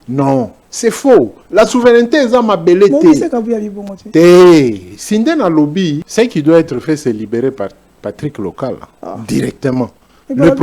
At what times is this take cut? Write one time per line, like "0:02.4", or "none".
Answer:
0:06.0
0:08.9